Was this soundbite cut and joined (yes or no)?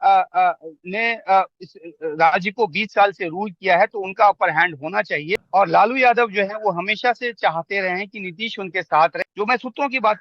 yes